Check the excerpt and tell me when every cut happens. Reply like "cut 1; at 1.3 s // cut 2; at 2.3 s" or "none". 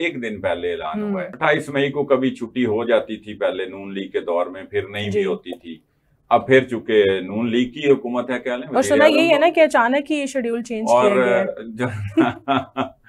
cut 1; at 1.3 s